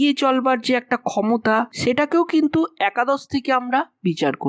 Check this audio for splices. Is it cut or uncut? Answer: uncut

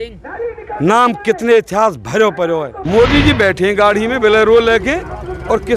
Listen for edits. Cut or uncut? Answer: cut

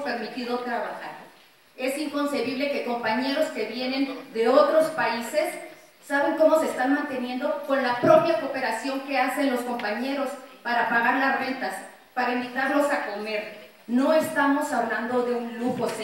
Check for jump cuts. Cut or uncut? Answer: uncut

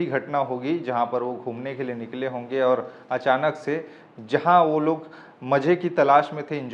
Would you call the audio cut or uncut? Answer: uncut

